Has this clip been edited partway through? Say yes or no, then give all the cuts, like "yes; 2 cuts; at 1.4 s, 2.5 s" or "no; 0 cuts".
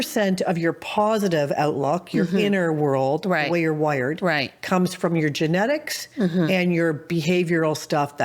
no; 0 cuts